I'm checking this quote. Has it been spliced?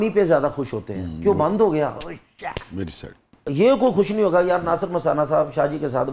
no; 0 cuts

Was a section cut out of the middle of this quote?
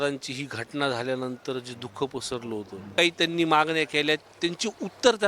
yes; 1 cut; at 2.9 s

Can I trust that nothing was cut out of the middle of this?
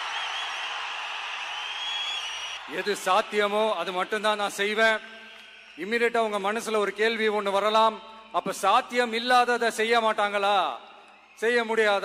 no; 1 cut; at 2.6 s

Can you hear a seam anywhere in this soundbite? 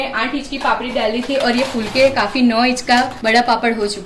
yes; 1 cut; at 3.1 s

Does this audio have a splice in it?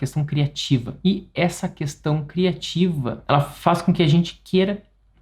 yes; 2 cuts; at 0.9 s, 3.1 s

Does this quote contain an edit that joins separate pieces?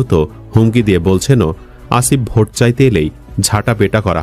no; 0 cuts

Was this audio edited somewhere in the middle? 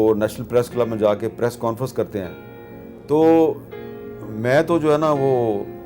no; 0 cuts

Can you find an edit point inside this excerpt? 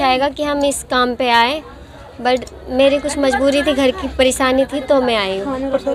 no; 0 cuts

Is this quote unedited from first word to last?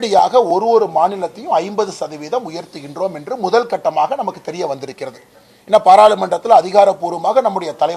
yes; 0 cuts

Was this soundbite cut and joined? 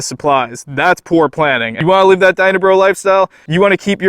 yes; 1 cut; at 1.7 s

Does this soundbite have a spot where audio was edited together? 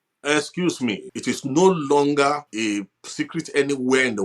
yes; 2 cuts; at 1.1 s, 2.5 s

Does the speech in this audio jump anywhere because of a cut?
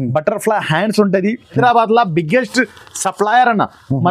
yes; 1 cut; at 1.6 s

